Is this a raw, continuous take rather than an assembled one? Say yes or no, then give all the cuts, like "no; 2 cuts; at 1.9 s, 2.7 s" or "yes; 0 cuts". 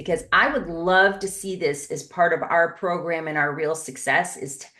yes; 0 cuts